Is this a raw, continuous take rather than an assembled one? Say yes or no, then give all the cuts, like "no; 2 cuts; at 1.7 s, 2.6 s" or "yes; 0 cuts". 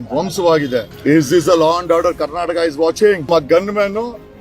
no; 2 cuts; at 0.9 s, 3.3 s